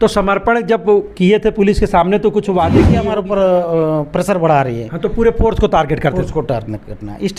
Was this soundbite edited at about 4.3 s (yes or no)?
no